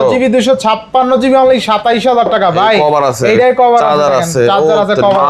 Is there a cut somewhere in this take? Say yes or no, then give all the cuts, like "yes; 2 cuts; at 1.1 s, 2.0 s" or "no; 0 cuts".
no; 0 cuts